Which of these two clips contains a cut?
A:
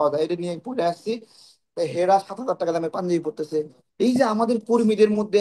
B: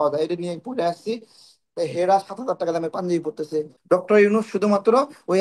B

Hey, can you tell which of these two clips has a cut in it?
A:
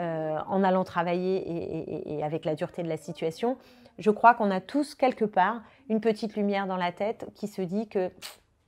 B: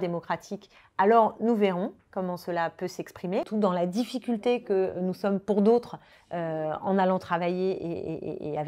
B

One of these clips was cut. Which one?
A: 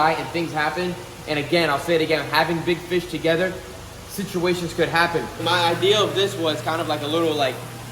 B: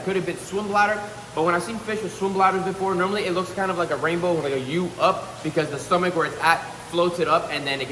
A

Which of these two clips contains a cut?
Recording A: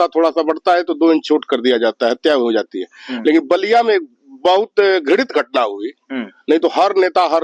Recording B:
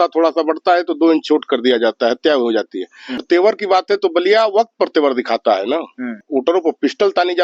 B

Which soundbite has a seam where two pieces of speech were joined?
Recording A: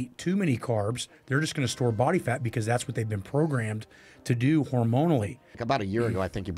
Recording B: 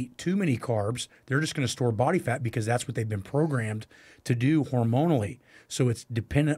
A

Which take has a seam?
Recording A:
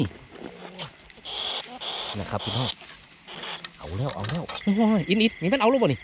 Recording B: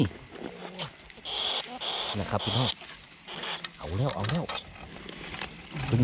A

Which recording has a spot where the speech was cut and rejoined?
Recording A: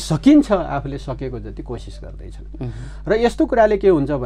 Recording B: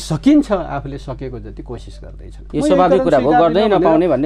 B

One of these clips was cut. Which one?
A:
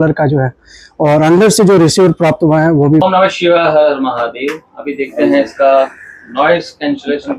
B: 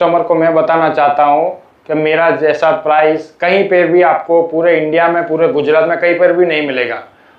A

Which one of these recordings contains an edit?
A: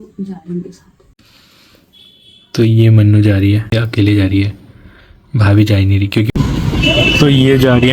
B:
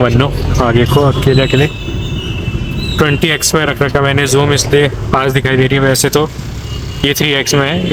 A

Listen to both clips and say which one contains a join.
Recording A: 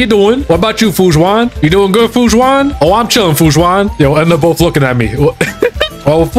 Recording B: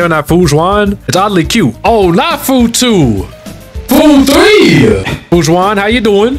B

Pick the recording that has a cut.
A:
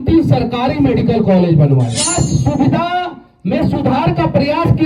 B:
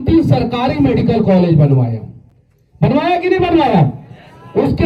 A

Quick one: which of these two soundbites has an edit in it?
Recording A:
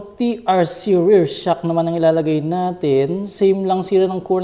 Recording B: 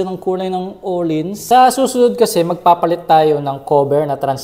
B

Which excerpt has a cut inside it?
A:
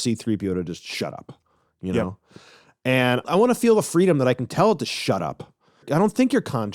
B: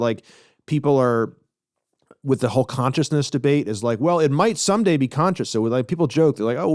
A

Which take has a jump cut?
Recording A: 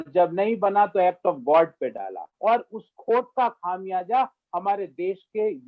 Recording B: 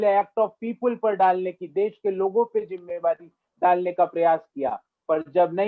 A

